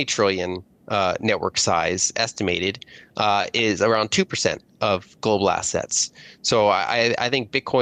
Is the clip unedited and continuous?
yes; 0 cuts

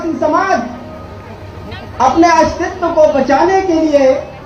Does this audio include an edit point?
no; 0 cuts

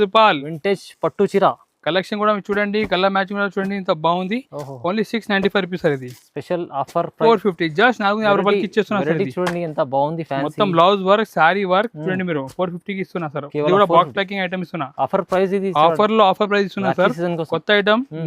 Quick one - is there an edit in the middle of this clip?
yes; 1 cut; at 7.3 s

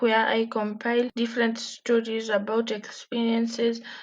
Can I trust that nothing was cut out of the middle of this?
no; 1 cut; at 1.1 s

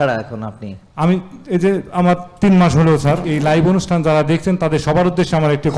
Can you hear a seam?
yes; 1 cut; at 3.3 s

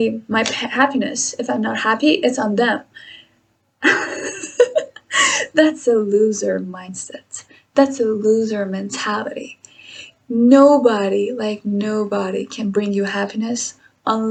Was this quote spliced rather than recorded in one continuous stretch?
no; 0 cuts

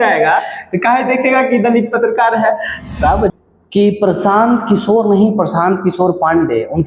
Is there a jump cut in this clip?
yes; 1 cut; at 3.3 s

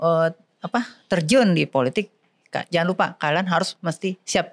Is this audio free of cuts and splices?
yes; 0 cuts

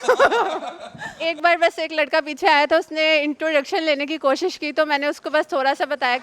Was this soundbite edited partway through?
yes; 1 cut; at 1.2 s

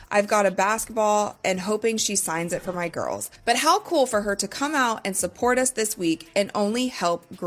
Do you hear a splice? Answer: no; 0 cuts

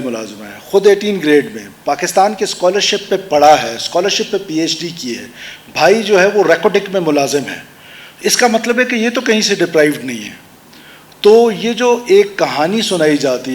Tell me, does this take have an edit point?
no; 0 cuts

